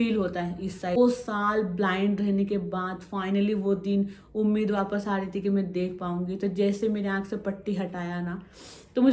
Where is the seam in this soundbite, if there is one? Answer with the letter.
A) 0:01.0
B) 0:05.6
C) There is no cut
A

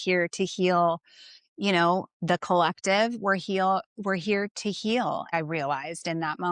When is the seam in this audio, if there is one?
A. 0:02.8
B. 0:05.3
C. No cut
B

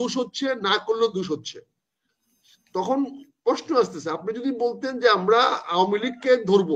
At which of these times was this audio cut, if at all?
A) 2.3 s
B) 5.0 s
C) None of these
C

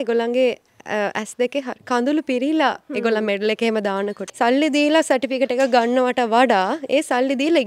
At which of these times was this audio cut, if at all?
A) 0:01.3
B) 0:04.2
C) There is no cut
B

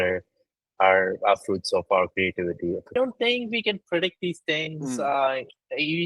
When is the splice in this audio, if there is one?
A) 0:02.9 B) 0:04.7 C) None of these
A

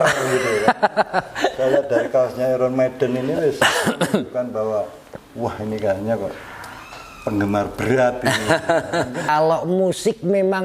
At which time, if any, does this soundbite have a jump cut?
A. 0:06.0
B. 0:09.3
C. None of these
B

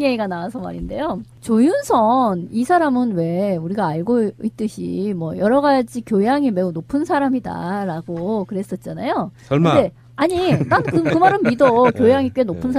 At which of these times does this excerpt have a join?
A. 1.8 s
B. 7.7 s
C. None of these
C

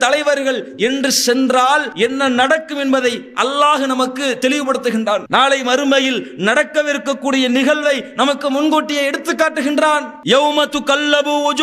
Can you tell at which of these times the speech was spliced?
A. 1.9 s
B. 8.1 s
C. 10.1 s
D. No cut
A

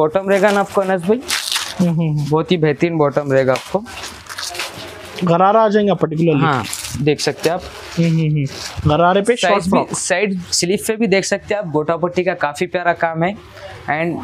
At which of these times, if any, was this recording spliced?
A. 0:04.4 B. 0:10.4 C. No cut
B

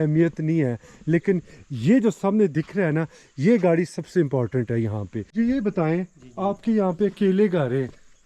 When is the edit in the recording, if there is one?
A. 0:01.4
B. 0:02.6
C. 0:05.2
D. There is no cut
C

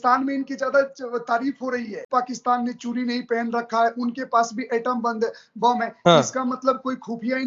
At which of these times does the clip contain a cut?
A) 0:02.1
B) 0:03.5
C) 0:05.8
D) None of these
A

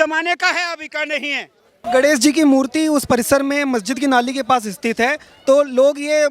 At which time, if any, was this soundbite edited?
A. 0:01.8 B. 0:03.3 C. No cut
A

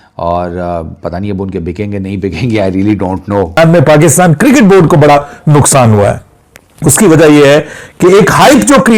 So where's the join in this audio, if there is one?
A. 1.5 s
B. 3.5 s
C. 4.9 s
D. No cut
B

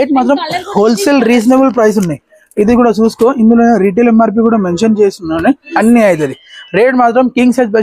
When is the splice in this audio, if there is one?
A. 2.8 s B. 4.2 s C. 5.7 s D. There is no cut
C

